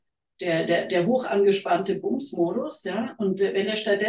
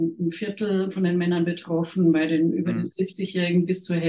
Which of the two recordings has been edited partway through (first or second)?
second